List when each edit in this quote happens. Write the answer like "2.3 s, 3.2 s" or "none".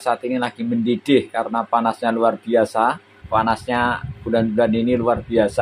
3.2 s